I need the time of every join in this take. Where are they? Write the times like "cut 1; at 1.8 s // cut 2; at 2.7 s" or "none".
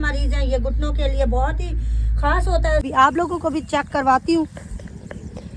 cut 1; at 2.9 s